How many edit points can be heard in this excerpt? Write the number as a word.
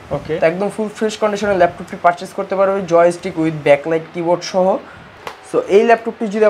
zero